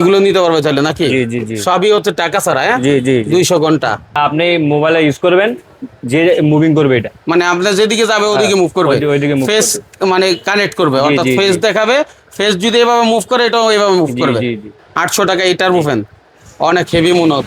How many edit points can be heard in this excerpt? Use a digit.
2